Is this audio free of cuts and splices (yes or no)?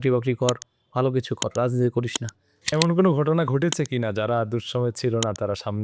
no